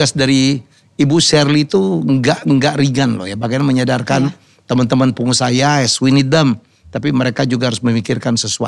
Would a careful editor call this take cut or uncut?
uncut